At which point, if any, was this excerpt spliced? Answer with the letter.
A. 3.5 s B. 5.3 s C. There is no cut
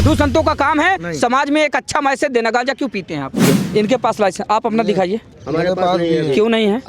A